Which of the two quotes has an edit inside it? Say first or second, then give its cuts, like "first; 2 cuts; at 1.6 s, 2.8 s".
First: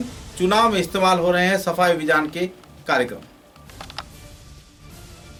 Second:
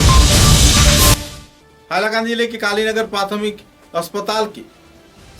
second; 1 cut; at 1.1 s